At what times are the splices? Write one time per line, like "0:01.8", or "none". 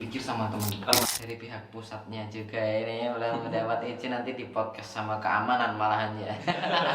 0:01.0